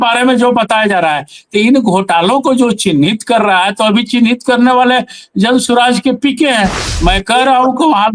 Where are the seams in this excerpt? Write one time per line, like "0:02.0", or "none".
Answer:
0:06.8

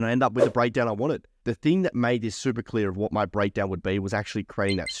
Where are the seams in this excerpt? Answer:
0:01.3

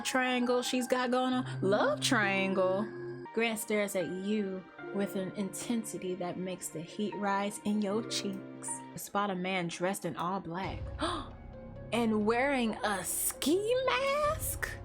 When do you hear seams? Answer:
0:03.2
0:09.0

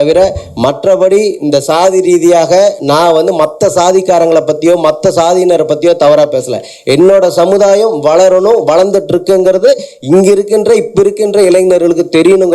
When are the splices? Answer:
none

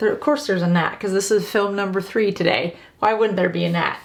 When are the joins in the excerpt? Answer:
none

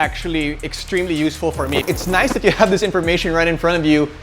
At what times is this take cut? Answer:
0:01.8

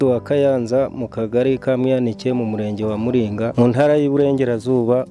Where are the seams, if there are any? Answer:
0:03.5

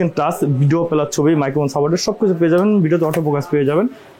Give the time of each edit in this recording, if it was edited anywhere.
none

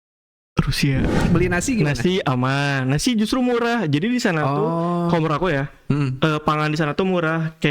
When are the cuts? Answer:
0:01.3

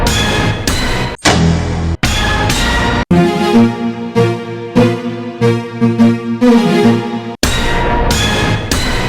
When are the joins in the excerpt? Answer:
0:00.9

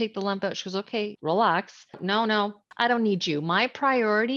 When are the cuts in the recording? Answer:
0:01.2
0:02.3

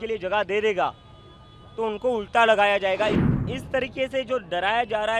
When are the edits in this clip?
0:03.3

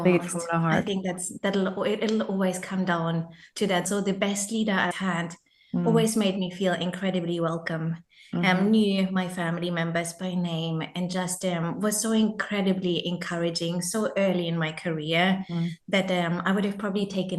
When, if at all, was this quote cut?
none

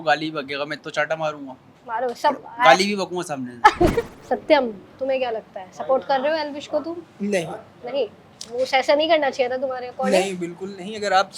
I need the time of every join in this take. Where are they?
0:04.2

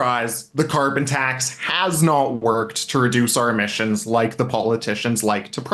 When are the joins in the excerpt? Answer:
none

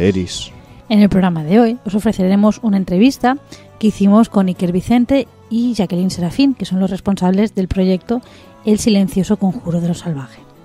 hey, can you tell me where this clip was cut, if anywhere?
none

